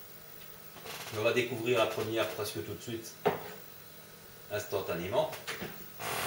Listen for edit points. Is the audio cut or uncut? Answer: cut